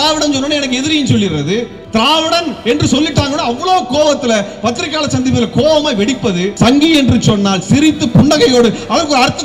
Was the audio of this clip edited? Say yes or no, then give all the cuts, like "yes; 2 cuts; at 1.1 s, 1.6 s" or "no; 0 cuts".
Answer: yes; 2 cuts; at 1.8 s, 6.5 s